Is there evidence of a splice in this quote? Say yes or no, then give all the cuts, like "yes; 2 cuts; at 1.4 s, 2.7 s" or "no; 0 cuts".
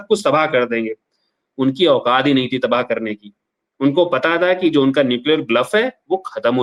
no; 0 cuts